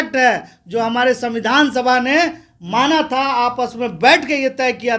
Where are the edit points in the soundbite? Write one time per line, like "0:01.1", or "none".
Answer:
none